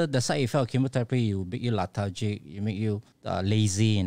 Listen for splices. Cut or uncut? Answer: cut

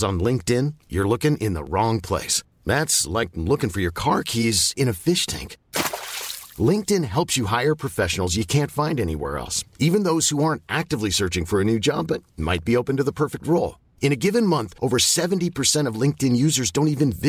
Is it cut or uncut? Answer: uncut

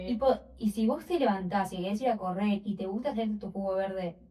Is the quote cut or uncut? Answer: uncut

